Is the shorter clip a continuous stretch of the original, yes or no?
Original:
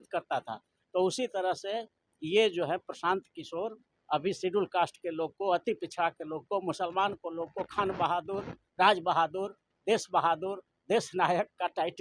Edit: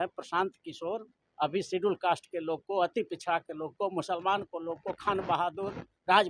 yes